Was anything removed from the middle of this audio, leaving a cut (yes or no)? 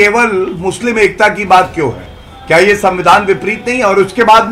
no